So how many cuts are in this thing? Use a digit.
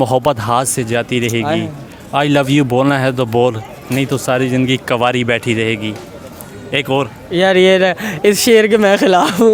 0